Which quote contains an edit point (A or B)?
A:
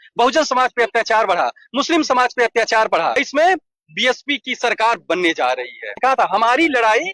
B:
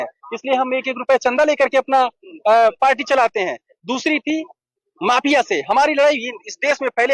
A